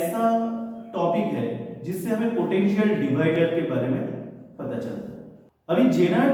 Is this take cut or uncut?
uncut